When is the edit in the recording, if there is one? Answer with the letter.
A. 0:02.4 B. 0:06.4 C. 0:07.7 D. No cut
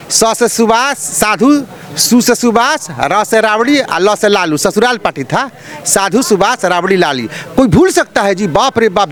D